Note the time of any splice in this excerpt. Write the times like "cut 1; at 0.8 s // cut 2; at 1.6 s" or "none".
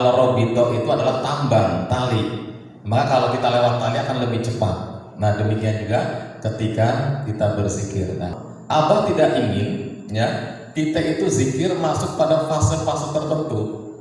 cut 1; at 8.3 s